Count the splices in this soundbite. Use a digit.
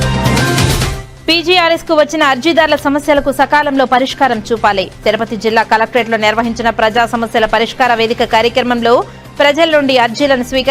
1